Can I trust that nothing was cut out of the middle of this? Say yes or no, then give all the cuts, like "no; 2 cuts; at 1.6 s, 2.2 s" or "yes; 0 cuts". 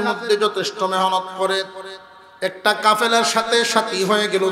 yes; 0 cuts